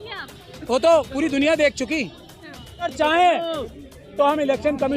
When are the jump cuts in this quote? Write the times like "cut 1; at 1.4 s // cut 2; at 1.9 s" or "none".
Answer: cut 1; at 2.9 s